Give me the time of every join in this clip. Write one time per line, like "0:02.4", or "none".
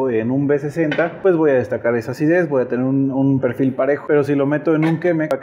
none

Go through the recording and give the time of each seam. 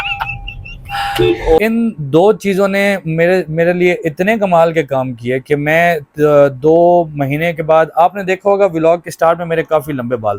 0:01.6

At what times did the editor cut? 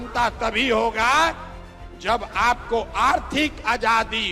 none

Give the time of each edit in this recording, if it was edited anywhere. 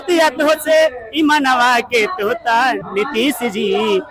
0:02.8

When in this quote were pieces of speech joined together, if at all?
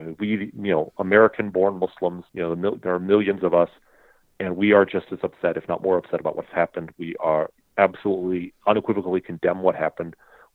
0:02.3

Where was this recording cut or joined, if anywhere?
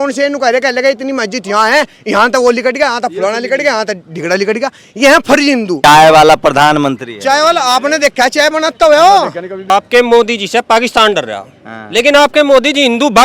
0:05.8
0:09.5

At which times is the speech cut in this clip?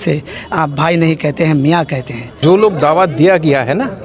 0:02.4

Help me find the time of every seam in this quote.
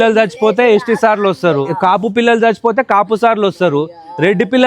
0:01.7

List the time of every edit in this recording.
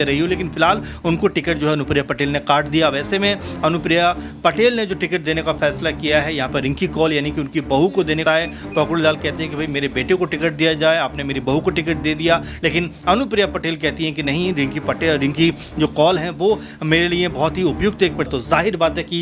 0:08.2
0:18.3

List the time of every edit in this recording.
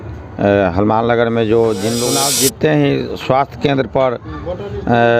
0:02.1

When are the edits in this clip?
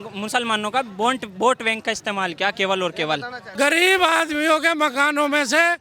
0:03.4

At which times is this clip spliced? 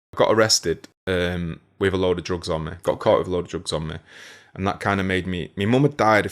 0:00.9

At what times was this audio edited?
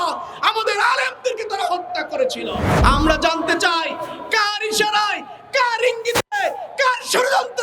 0:02.8

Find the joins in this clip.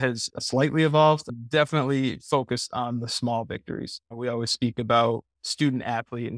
0:04.0
0:05.4

